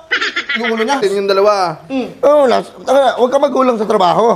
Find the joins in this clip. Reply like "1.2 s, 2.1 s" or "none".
1.0 s